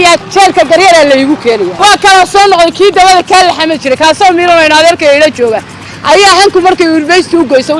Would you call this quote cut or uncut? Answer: cut